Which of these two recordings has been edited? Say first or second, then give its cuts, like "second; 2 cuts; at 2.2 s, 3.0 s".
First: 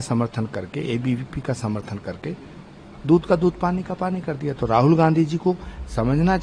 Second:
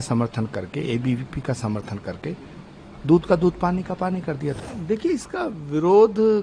second; 1 cut; at 4.6 s